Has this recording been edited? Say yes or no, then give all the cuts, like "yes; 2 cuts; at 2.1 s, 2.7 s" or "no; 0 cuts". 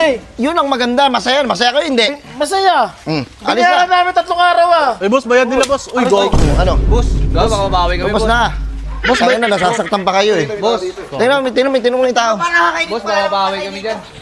no; 0 cuts